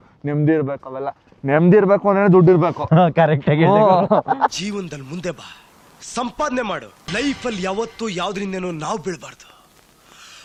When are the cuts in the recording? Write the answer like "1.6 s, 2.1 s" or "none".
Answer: none

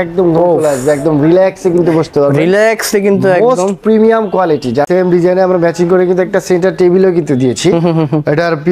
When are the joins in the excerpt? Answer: 4.9 s

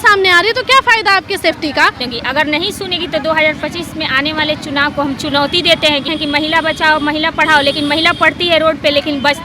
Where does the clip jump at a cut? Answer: 2.1 s, 6.1 s

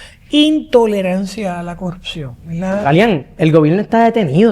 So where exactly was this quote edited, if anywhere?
2.8 s

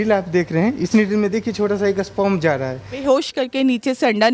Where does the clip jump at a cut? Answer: 3.0 s

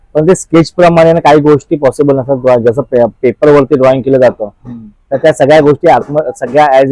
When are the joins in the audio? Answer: none

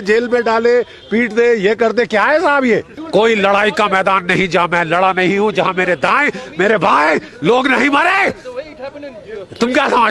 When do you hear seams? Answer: 3.0 s

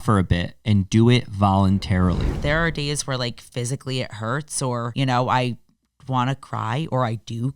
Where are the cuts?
2.4 s, 4.9 s

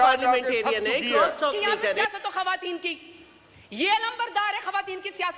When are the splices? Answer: 2.0 s

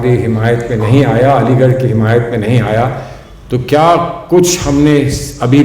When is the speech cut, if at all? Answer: none

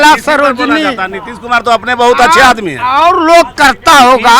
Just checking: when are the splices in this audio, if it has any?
none

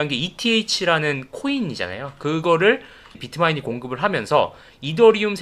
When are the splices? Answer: none

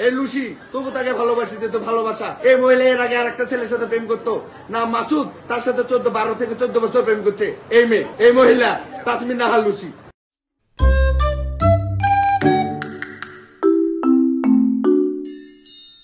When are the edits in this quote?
none

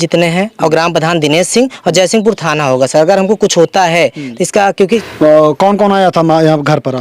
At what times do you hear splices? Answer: 5.0 s

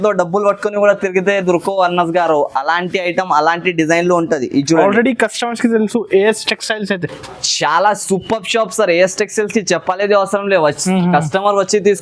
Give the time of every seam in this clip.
none

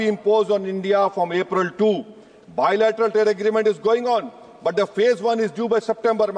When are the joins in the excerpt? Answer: none

